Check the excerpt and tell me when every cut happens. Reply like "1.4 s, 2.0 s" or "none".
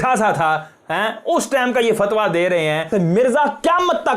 2.9 s